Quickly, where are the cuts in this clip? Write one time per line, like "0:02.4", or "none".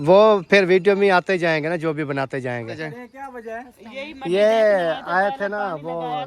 0:02.8